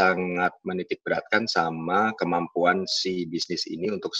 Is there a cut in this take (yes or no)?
no